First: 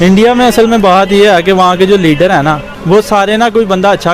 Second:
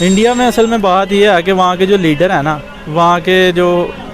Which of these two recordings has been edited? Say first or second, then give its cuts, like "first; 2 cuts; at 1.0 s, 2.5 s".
first; 1 cut; at 2.7 s